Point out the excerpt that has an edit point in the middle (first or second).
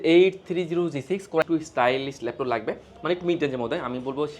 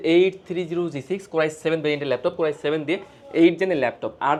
first